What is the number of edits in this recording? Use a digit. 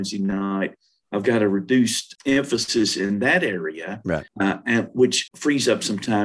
3